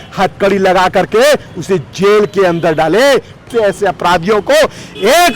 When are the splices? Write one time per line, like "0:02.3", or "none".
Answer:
0:03.5